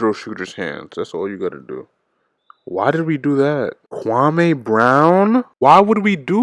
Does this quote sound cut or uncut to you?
cut